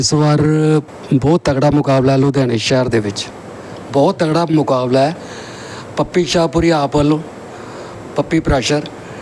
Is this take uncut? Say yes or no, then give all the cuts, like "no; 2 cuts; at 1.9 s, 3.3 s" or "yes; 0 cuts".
yes; 0 cuts